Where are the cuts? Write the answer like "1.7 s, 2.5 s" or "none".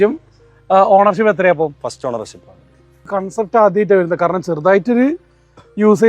3.2 s